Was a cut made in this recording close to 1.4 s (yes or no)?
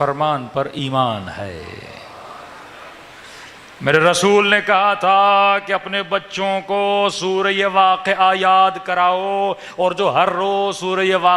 no